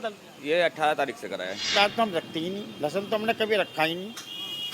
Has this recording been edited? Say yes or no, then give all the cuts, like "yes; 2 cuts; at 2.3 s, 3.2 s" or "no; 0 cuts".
yes; 1 cut; at 1.7 s